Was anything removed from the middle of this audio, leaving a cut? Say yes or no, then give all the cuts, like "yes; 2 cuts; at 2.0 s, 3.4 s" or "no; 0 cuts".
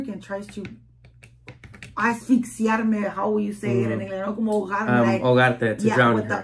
no; 0 cuts